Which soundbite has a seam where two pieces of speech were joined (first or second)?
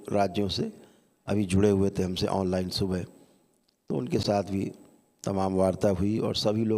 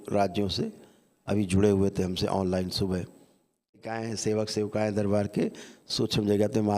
second